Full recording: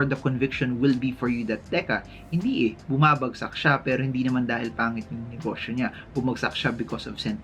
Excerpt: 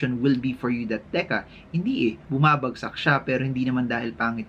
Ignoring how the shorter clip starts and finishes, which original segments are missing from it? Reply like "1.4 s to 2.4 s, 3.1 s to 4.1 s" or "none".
none